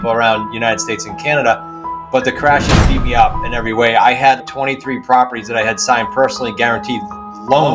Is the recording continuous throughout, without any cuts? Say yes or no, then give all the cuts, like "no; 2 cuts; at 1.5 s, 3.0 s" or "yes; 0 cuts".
yes; 0 cuts